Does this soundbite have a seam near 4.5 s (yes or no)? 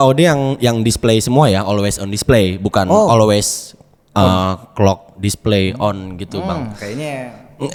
no